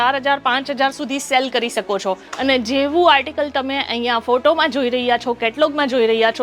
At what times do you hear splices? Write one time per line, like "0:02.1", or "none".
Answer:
0:02.3